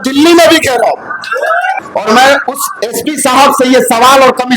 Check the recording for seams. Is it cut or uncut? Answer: cut